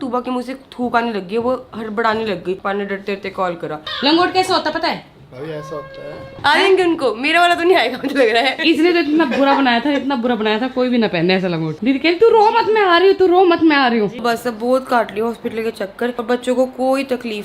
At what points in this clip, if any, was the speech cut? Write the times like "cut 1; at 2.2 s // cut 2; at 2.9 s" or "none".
cut 1; at 2.6 s // cut 2; at 3.8 s // cut 3; at 6.3 s // cut 4; at 8.6 s // cut 5; at 11.7 s // cut 6; at 14.2 s // cut 7; at 16.2 s